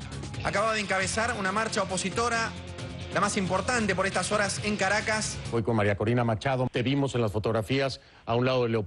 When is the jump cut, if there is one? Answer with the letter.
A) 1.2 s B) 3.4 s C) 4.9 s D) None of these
D